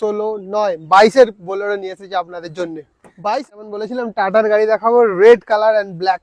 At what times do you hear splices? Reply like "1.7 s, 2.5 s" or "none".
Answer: 3.2 s